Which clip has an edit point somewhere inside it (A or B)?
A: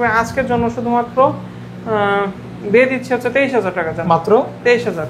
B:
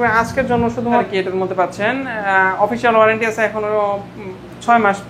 B